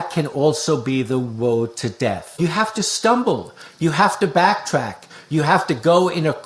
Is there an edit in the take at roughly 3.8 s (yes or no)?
no